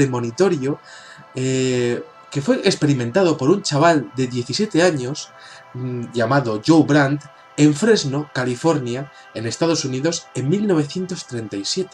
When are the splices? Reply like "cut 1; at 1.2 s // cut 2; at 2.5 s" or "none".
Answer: cut 1; at 4.1 s